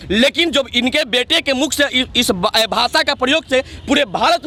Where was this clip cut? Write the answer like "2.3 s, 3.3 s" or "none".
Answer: none